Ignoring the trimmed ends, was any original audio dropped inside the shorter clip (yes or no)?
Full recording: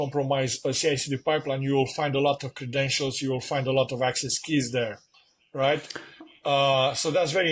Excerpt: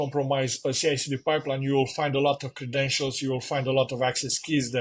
no